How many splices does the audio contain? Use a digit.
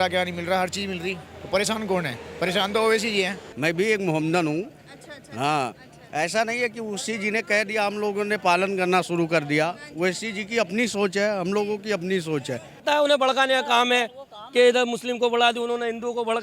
2